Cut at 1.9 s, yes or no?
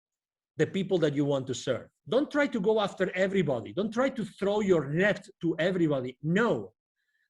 yes